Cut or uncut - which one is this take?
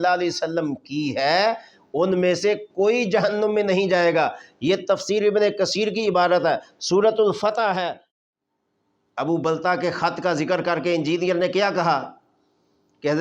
cut